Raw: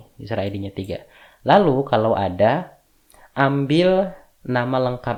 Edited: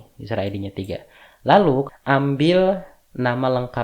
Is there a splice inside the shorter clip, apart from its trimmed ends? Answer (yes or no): yes